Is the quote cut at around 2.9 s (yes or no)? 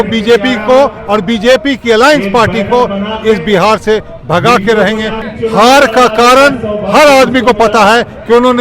no